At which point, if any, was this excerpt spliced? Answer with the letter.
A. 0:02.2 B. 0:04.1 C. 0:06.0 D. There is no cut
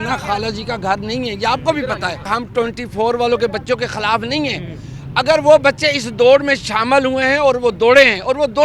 A